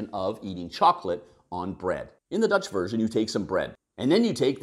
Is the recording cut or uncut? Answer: cut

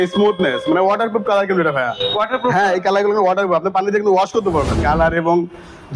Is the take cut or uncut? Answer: cut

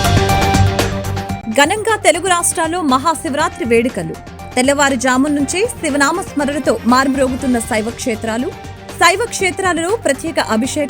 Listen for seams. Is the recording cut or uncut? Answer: cut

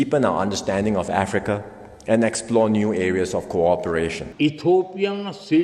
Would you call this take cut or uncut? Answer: cut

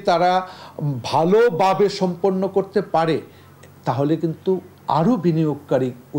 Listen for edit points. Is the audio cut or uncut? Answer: uncut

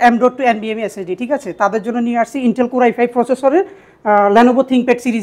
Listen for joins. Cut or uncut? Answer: uncut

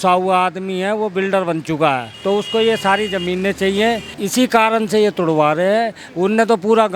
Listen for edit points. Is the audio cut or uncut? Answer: cut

